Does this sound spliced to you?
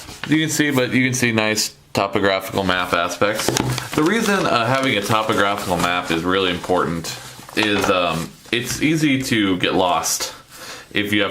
yes; 1 cut; at 2.1 s

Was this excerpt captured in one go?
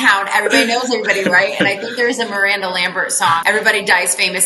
no; 1 cut; at 3.4 s

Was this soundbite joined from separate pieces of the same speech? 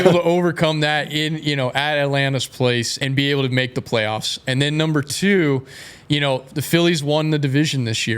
yes; 1 cut; at 2.9 s

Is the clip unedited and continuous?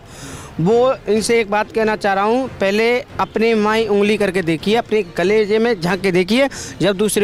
yes; 0 cuts

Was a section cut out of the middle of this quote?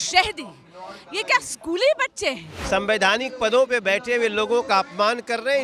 yes; 1 cut; at 2.5 s

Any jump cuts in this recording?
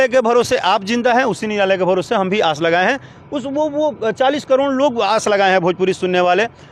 no; 0 cuts

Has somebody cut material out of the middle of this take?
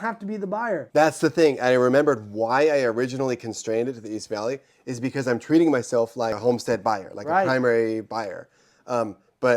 yes; 2 cuts; at 0.8 s, 6.4 s

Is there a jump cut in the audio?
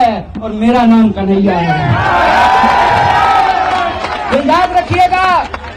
no; 0 cuts

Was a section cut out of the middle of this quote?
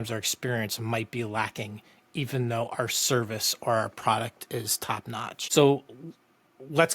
yes; 1 cut; at 5.4 s

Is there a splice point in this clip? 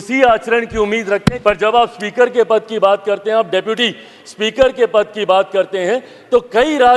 yes; 1 cut; at 1.4 s

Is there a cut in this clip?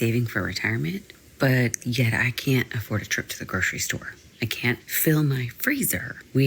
no; 0 cuts

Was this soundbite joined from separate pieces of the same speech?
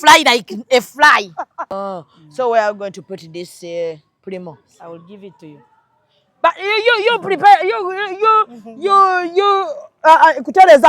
yes; 1 cut; at 1.7 s

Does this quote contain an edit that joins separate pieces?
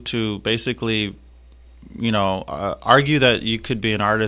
no; 0 cuts

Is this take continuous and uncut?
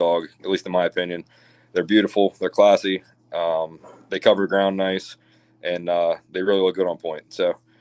yes; 0 cuts

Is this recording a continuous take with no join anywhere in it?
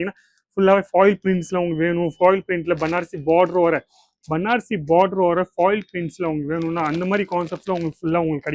yes; 0 cuts

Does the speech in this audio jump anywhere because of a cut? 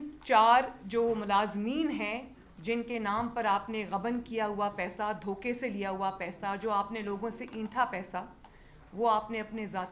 no; 0 cuts

